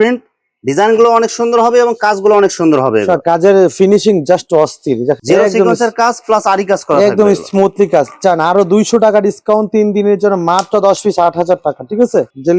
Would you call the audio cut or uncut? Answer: uncut